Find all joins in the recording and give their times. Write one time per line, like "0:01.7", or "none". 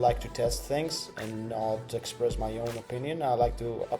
none

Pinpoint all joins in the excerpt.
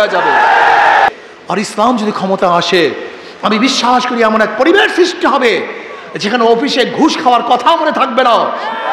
0:01.1

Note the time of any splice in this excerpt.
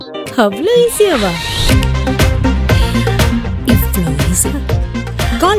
none

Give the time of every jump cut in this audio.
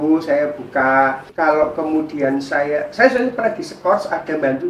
0:01.3

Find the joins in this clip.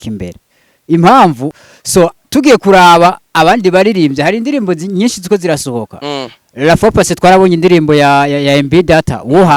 0:01.4

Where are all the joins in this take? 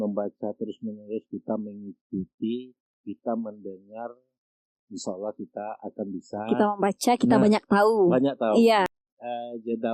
0:08.9

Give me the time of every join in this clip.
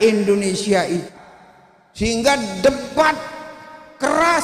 0:01.1

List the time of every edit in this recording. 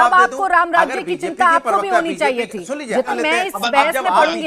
0:03.1

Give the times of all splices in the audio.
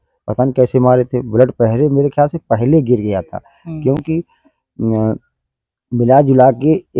none

